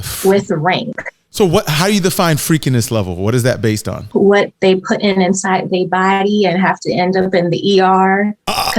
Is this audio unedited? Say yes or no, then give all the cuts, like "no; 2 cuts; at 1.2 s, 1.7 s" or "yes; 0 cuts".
no; 1 cut; at 4.0 s